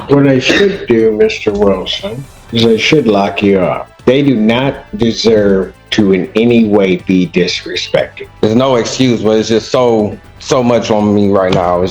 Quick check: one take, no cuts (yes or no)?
no